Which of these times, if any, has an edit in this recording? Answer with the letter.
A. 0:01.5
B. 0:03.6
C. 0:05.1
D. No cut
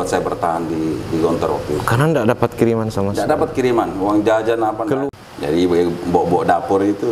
C